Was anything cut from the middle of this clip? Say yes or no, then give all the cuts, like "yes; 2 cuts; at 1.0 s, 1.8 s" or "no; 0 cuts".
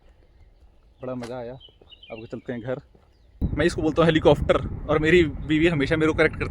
yes; 1 cut; at 3.4 s